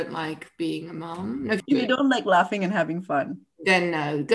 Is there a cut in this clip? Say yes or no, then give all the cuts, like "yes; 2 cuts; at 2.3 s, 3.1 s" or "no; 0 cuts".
yes; 1 cut; at 1.6 s